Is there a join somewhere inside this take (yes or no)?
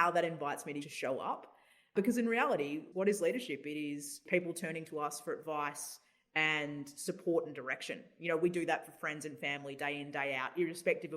yes